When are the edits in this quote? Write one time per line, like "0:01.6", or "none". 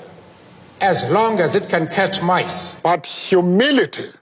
0:02.6